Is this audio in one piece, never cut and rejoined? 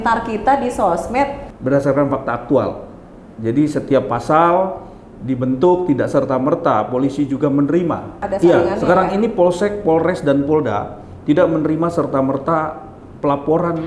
no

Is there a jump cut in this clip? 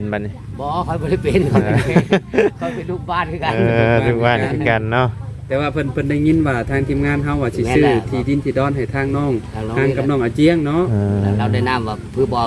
no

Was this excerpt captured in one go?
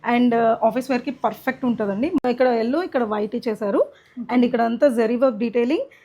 no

